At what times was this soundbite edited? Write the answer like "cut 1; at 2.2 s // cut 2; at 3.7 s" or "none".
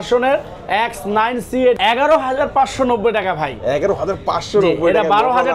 cut 1; at 1.8 s